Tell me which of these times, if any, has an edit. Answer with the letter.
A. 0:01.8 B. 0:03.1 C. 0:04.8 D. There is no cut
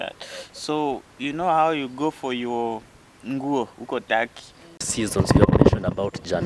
C